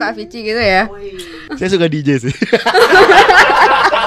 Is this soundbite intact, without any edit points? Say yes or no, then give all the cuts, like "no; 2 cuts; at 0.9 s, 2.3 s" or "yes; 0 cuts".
no; 1 cut; at 1.4 s